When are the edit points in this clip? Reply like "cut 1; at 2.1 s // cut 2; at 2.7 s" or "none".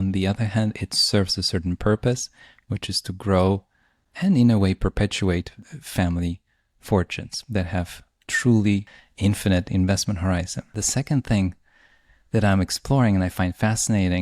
cut 1; at 9.0 s // cut 2; at 10.8 s